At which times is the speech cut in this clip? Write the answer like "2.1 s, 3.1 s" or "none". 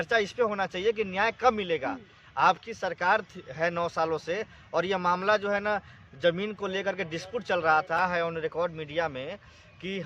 8.0 s